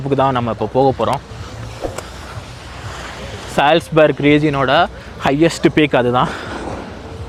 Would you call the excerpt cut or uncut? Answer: uncut